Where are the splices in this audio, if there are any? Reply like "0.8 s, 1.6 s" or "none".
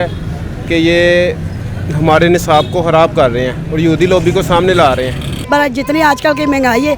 5.4 s